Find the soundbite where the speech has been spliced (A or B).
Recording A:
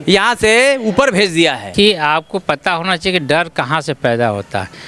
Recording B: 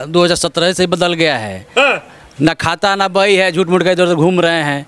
A